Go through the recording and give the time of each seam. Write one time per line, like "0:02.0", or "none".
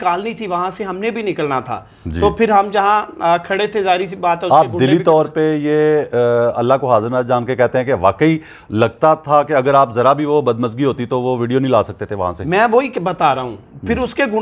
none